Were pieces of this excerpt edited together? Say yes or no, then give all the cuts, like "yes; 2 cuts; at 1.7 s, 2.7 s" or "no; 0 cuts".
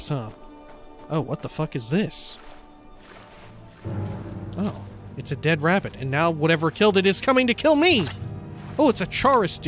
no; 0 cuts